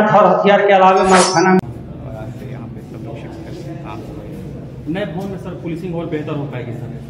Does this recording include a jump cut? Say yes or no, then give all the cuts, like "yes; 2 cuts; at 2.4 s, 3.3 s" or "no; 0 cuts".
yes; 1 cut; at 1.6 s